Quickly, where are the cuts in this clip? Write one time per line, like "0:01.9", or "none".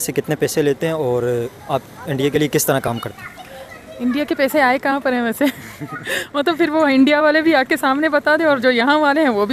none